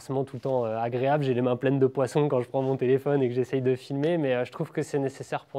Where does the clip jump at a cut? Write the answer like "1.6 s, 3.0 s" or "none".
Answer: none